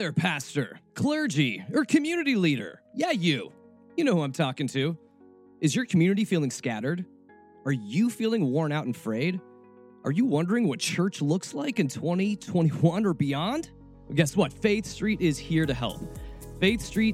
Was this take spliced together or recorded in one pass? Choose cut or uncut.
cut